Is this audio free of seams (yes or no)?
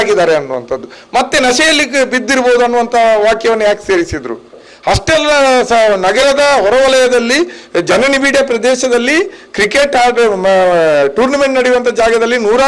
no